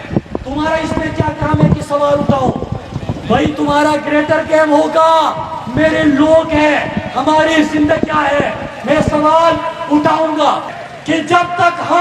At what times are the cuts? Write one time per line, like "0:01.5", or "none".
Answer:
0:10.8